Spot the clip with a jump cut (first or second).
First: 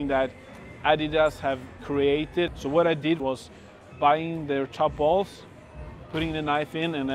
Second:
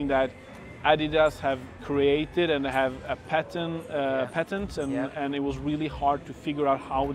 first